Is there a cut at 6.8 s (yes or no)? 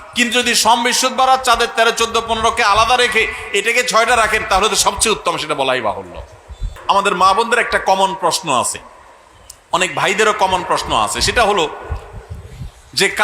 yes